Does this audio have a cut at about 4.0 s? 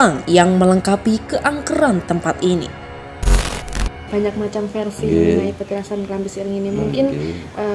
yes; 1 cut; at 4.0 s

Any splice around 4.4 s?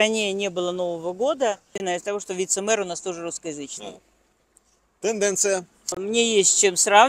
no; 2 cuts; at 1.7 s, 6.0 s

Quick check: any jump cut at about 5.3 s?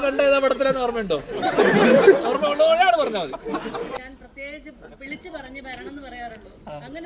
no; 1 cut; at 4.0 s

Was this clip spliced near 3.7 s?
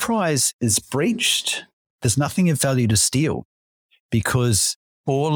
no; 1 cut; at 1.9 s

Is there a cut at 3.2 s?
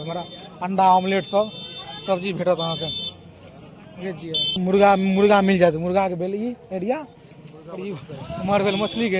no; 1 cut; at 4.6 s

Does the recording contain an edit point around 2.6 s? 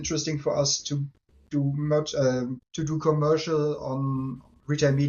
yes; 1 cut; at 2.6 s

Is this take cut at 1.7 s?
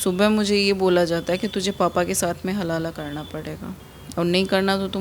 no; 1 cut; at 3.9 s

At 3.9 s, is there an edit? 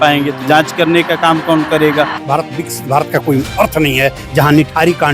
no; 1 cut; at 2.2 s

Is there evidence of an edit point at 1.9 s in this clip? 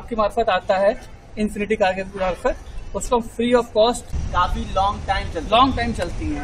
no; 1 cut; at 4.1 s

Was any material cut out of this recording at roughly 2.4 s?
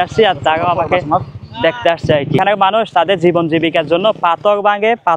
yes; 1 cut; at 2.4 s

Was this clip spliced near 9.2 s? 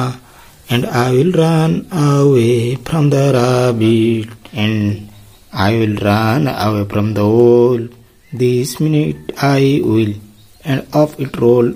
no; 1 cut; at 4.5 s

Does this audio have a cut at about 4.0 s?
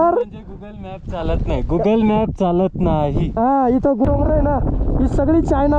yes; 1 cut; at 4.0 s

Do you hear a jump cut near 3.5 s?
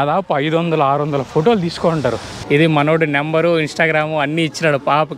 no; 1 cut; at 2.3 s

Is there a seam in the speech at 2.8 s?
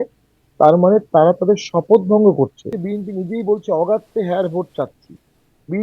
yes; 1 cut; at 2.8 s

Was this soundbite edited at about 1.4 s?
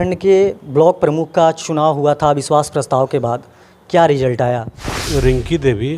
no; 1 cut; at 4.8 s

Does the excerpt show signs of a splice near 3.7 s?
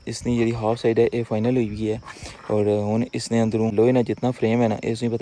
yes; 1 cut; at 3.7 s

